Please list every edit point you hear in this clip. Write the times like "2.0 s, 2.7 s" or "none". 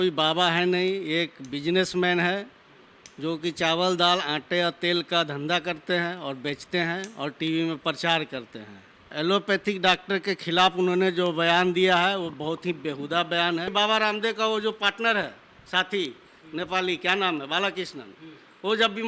9.0 s, 13.7 s